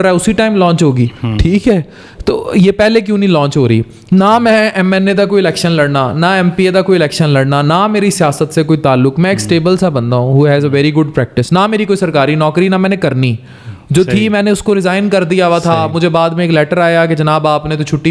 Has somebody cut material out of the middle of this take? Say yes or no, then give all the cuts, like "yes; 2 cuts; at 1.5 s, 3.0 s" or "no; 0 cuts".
no; 0 cuts